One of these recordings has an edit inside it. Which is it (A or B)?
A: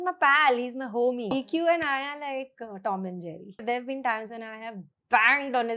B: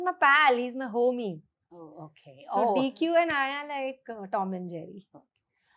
A